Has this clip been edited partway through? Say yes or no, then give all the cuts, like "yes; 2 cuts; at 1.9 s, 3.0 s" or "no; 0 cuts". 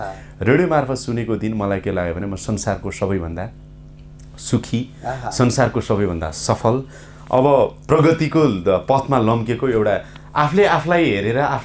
no; 0 cuts